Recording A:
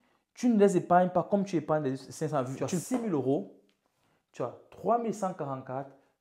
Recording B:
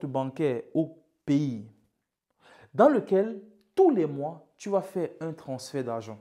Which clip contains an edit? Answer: A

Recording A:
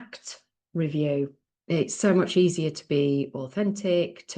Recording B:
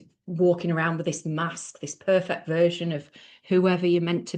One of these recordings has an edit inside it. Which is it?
A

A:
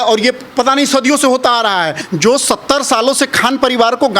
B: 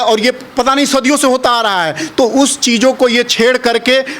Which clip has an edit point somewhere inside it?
A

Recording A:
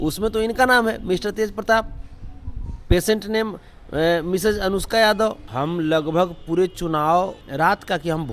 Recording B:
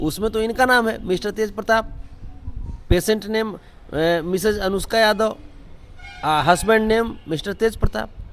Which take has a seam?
A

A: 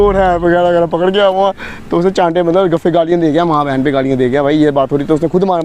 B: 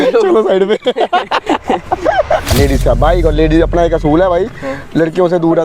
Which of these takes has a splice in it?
B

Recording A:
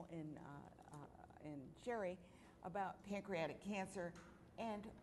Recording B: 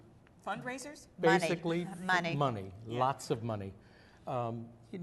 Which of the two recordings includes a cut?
B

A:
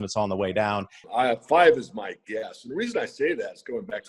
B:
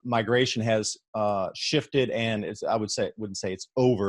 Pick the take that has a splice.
A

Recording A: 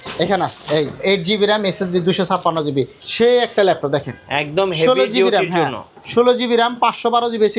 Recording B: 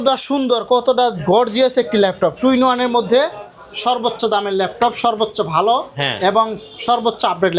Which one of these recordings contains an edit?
A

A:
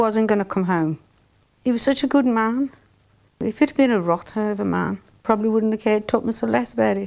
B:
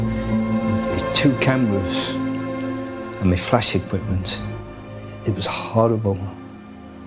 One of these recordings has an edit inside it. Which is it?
A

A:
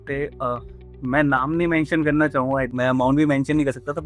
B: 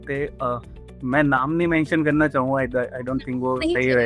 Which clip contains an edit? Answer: A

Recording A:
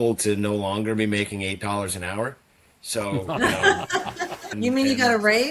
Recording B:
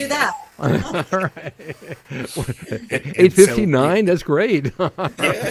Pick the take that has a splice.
A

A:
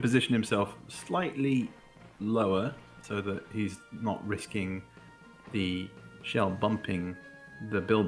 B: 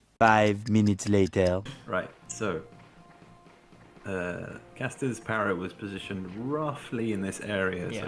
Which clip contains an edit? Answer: B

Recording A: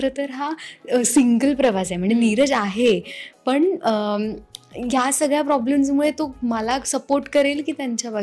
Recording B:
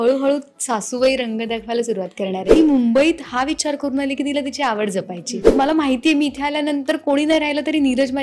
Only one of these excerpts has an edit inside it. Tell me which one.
B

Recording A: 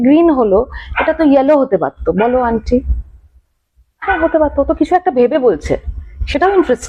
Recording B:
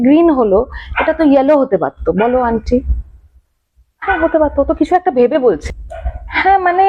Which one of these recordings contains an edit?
B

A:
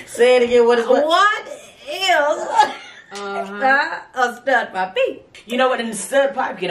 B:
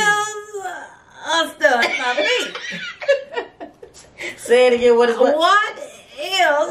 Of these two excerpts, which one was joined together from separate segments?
A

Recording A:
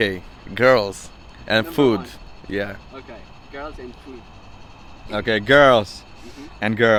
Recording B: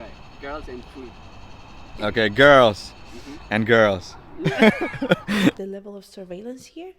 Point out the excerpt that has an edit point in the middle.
B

